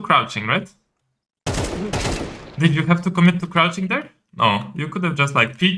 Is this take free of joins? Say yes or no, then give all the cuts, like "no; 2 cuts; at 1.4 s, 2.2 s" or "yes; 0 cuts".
yes; 0 cuts